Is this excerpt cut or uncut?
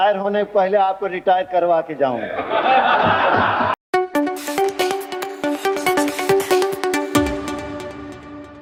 uncut